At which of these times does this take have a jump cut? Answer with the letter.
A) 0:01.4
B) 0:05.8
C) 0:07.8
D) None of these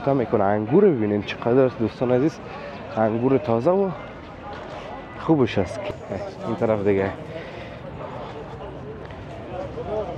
B